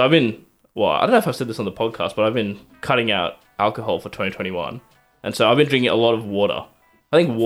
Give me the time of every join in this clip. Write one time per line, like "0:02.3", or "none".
none